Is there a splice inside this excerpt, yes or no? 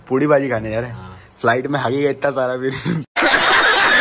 yes